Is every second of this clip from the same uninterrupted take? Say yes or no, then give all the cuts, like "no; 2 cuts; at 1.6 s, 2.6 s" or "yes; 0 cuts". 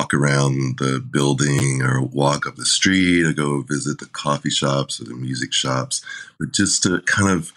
yes; 0 cuts